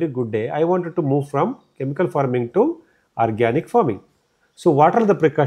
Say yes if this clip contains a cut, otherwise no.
no